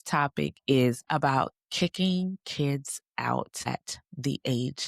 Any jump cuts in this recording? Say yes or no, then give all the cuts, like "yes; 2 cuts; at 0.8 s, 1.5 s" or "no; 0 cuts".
yes; 2 cuts; at 1.0 s, 3.7 s